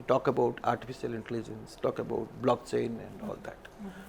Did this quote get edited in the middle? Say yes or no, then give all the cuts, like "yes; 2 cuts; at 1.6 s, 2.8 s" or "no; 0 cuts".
no; 0 cuts